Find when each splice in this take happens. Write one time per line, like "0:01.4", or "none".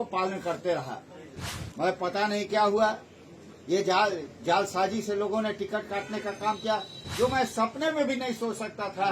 none